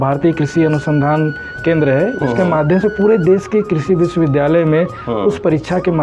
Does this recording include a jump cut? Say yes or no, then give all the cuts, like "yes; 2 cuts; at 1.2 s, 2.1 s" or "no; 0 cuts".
no; 0 cuts